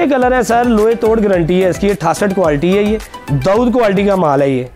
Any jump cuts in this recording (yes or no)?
no